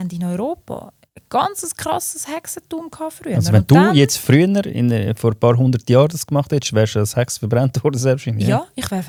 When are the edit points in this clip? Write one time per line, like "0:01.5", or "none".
none